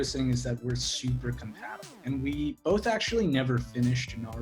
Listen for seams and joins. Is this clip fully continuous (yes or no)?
no